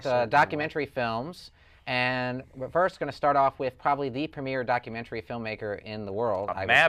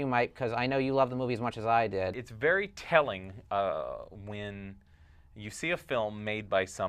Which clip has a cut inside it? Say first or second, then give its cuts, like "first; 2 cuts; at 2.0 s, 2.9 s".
first; 1 cut; at 3.9 s